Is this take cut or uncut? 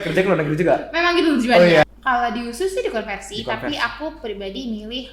cut